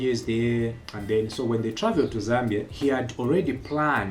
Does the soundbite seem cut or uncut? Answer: cut